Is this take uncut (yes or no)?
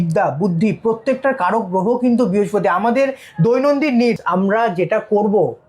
no